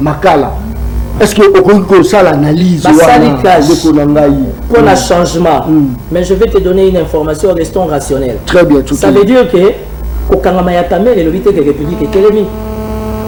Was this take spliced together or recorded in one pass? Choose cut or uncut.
uncut